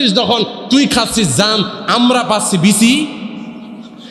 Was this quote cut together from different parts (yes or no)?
no